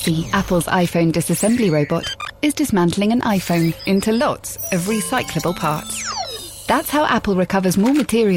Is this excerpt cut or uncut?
uncut